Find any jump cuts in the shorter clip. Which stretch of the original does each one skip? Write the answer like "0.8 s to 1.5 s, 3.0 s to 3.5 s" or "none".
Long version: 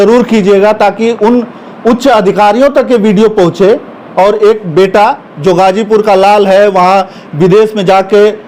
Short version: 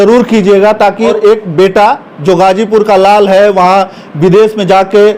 1.1 s to 4.3 s